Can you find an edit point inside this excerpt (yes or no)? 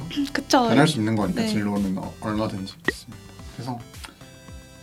no